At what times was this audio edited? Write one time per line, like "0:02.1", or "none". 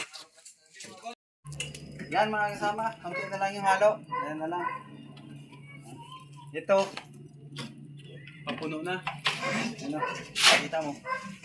0:01.2